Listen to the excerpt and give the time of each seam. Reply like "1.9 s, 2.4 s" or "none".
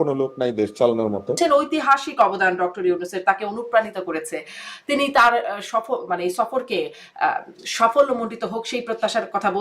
1.4 s